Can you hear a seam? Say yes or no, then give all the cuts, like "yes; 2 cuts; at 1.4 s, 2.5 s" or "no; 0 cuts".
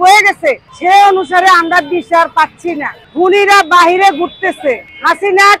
no; 0 cuts